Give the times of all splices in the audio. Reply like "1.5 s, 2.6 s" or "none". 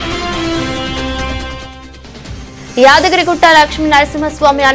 1.8 s